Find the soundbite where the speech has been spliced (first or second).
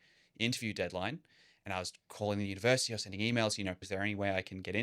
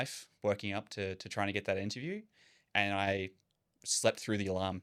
first